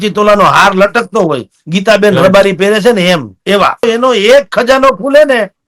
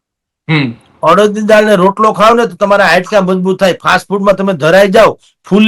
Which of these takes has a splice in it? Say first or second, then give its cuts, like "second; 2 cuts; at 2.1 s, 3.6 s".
first; 1 cut; at 3.9 s